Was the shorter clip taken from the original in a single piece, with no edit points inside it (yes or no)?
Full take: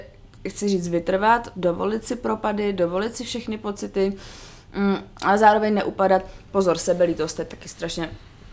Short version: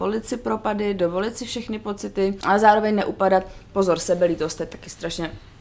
no